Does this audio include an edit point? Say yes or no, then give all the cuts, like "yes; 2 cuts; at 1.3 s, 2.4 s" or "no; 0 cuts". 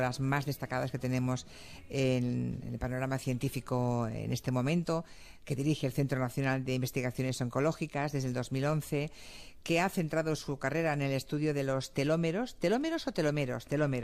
yes; 1 cut; at 6.3 s